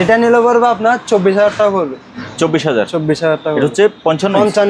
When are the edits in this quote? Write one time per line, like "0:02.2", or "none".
none